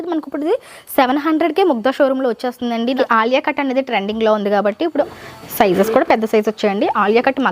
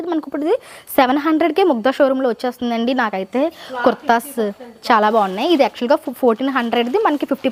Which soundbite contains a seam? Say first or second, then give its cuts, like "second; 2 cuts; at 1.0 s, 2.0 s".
first; 2 cuts; at 3.0 s, 5.1 s